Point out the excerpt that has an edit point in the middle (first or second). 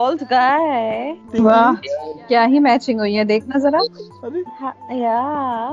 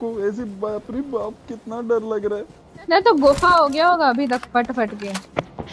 first